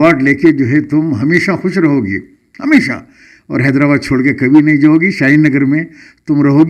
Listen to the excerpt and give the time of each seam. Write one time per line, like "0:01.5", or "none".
none

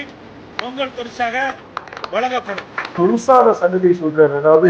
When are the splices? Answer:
0:03.0

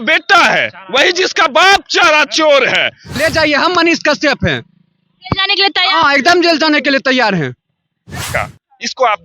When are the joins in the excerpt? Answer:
0:03.1
0:08.3

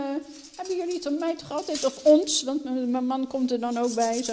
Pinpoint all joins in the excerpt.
none

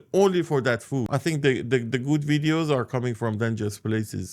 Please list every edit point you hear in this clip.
0:01.1

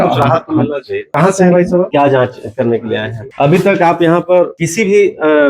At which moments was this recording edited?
0:01.1
0:01.9
0:03.2
0:04.6

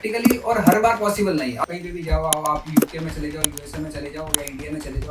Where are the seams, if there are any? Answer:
0:01.6

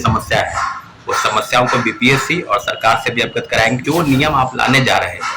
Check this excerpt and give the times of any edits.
0:03.8

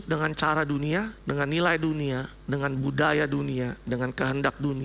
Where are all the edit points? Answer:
0:01.2

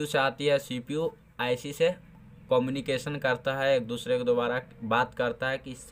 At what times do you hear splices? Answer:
none

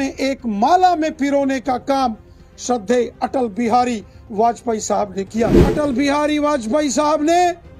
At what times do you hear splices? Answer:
0:05.6

